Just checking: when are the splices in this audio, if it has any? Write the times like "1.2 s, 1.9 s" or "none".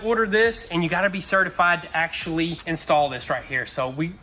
2.6 s